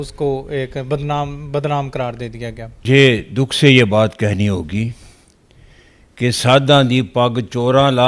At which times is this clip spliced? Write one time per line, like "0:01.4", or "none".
0:02.8